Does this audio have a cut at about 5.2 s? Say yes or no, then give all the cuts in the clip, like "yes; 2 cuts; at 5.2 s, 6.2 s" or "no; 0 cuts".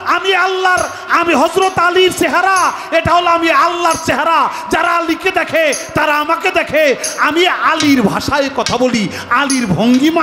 no; 0 cuts